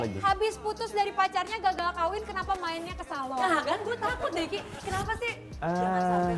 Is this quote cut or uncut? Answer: uncut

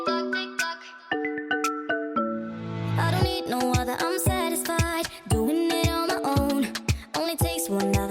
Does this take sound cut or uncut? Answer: cut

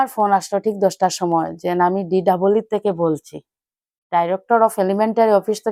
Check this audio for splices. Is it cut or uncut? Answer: uncut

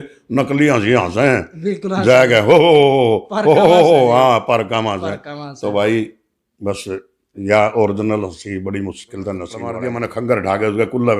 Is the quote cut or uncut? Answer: cut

